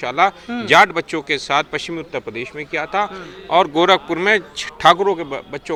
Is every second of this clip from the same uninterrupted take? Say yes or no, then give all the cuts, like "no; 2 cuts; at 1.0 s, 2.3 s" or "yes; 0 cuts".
yes; 0 cuts